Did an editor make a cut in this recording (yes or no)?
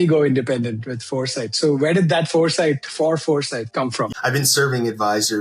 yes